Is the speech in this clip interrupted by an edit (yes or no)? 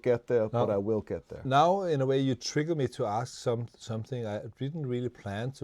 yes